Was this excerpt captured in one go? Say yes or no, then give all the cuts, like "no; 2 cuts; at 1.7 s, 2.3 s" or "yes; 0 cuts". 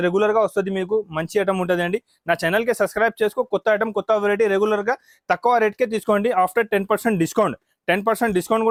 yes; 0 cuts